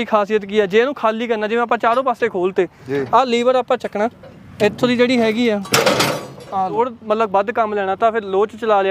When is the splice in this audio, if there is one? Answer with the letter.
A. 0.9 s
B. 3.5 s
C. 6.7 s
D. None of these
C